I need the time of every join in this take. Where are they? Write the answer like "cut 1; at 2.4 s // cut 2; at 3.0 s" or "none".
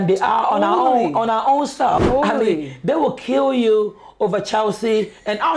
cut 1; at 2.0 s